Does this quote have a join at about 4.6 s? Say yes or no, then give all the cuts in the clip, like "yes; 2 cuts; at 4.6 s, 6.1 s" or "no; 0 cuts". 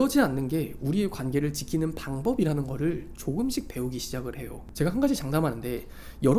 yes; 1 cut; at 4.6 s